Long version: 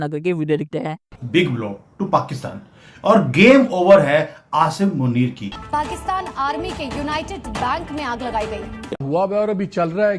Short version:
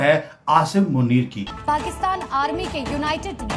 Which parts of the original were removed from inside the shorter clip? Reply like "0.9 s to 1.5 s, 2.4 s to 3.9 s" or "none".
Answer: none